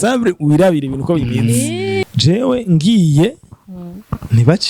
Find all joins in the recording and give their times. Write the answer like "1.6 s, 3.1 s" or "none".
2.0 s